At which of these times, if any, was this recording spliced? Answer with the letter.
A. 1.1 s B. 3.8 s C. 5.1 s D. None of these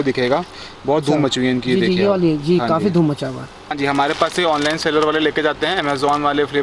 B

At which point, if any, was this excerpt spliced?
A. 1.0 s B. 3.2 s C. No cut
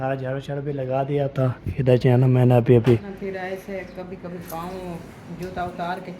B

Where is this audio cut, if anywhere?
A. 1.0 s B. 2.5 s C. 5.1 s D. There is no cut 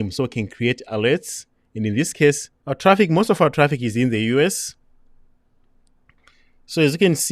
B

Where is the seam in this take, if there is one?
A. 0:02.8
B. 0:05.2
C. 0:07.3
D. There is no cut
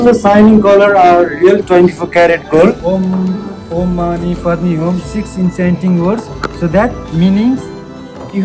A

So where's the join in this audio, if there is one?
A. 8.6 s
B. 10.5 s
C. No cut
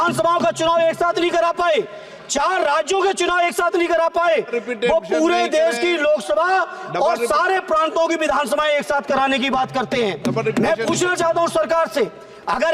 C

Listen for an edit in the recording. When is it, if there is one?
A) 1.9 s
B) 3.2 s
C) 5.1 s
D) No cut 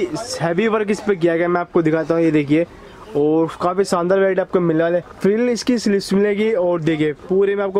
C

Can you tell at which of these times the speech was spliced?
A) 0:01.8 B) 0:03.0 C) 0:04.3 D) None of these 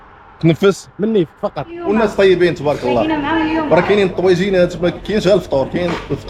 A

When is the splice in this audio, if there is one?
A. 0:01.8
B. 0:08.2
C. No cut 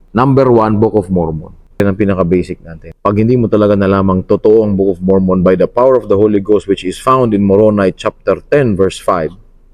A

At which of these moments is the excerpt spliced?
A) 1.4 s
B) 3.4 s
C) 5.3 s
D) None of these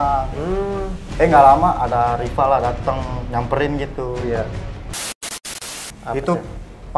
C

